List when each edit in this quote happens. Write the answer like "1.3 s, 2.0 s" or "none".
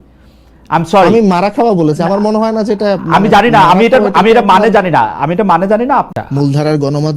6.1 s